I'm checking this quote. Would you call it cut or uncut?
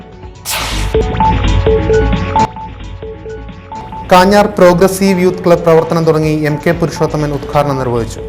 cut